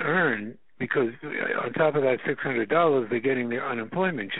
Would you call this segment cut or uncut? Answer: uncut